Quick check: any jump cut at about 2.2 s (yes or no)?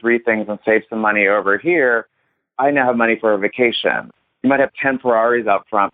no